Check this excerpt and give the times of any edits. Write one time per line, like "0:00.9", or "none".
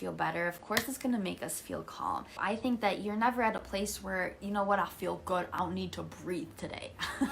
0:02.4